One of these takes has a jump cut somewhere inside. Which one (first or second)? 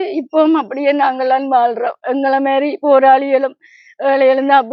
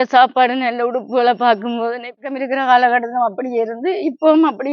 second